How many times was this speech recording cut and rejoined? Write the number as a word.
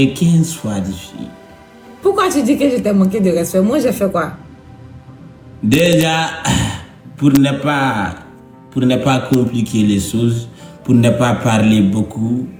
zero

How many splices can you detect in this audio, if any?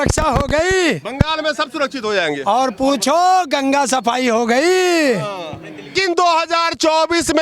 one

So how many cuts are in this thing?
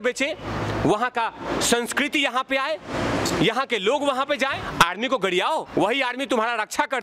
two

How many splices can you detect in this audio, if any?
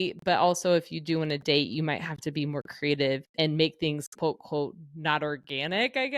zero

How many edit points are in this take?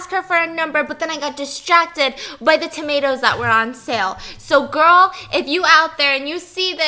zero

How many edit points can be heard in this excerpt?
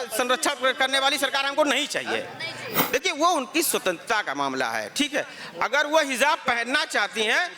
one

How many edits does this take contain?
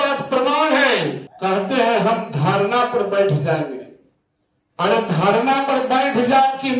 one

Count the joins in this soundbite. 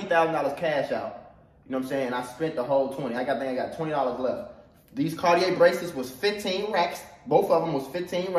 zero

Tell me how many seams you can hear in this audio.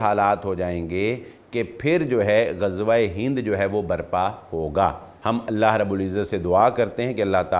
one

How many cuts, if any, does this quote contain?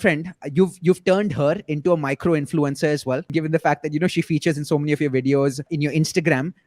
two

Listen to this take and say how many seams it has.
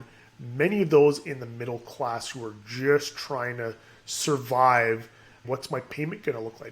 one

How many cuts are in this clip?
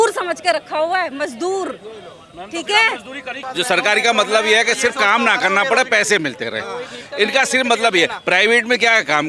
one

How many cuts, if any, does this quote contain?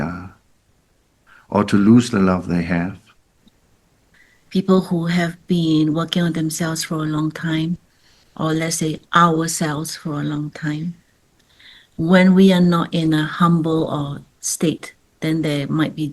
one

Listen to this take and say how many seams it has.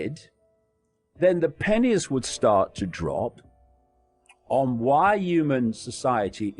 zero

